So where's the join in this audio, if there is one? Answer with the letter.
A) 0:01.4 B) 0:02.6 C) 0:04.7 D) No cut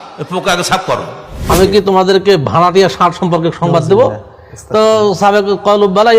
A